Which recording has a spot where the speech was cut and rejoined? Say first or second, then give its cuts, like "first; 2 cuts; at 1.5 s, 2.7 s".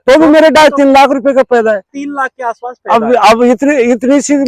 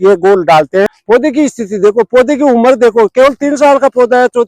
second; 1 cut; at 1.0 s